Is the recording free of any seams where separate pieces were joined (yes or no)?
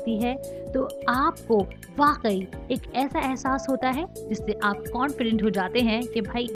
yes